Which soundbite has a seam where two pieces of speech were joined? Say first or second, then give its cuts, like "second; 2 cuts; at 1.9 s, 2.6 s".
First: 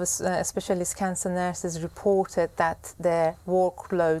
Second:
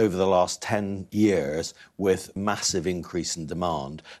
second; 2 cuts; at 1.0 s, 2.4 s